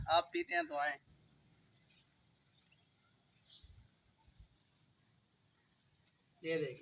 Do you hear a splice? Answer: no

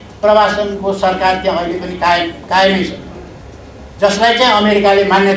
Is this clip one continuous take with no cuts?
yes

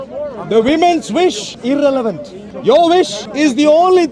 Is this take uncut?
no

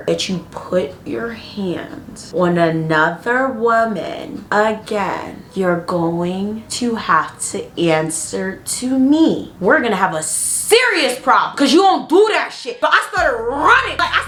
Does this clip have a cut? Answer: no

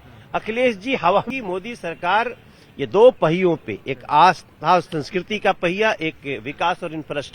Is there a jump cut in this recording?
yes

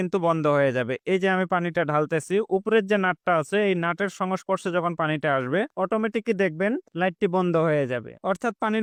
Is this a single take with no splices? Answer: yes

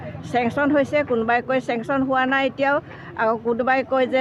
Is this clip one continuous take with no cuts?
yes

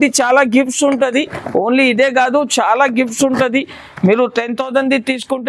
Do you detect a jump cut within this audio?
no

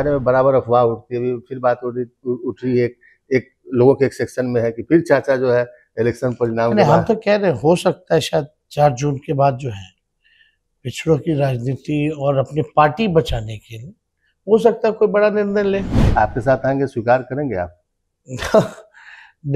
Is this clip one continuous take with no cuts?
yes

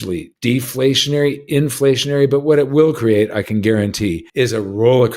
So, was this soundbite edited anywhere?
yes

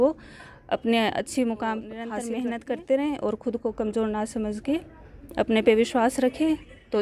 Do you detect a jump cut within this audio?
yes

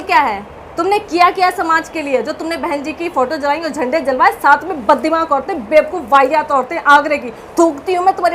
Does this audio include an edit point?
no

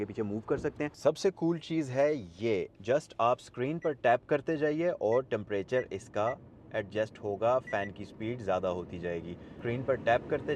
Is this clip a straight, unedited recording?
no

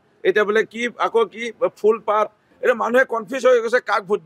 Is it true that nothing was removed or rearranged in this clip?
no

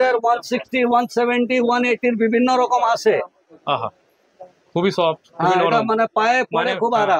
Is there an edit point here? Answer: no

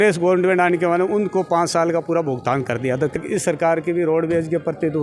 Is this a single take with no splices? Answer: no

